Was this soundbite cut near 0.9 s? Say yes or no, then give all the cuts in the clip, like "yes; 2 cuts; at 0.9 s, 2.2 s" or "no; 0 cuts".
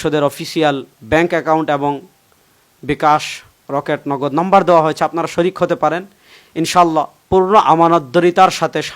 yes; 1 cut; at 0.9 s